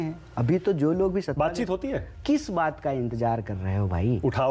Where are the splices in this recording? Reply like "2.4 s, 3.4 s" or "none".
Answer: 2.1 s